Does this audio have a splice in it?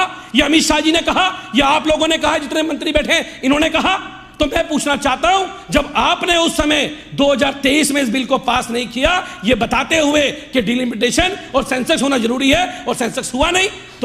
no; 0 cuts

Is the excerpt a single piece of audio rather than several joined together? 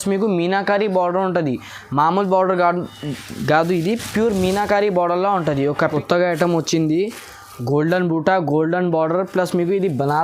no; 1 cut; at 5.8 s

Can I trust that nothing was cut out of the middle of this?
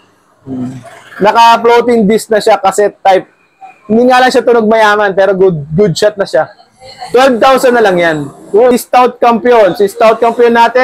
no; 1 cut; at 8.7 s

